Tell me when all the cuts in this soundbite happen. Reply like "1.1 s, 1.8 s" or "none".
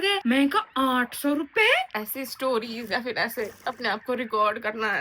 1.9 s